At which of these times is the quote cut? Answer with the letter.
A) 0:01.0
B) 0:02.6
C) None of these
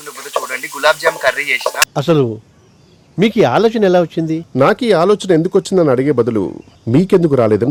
C